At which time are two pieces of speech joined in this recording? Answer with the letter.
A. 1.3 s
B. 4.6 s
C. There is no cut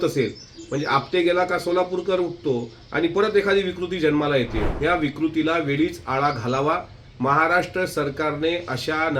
B